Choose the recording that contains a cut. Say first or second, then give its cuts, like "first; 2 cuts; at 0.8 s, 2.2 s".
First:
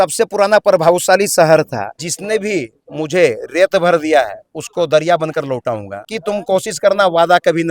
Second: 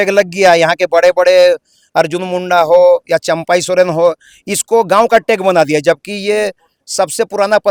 first; 2 cuts; at 1.9 s, 6.1 s